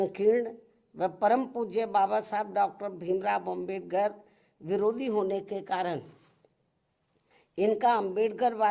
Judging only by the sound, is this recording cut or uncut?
uncut